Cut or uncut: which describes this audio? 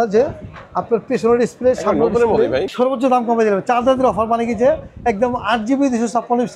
cut